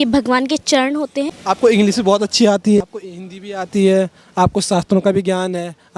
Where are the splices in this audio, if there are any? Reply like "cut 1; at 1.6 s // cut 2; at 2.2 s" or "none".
cut 1; at 1.3 s // cut 2; at 2.8 s